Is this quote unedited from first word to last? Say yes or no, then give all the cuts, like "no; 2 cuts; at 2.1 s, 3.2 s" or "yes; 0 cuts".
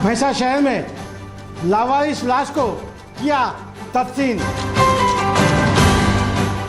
no; 1 cut; at 4.5 s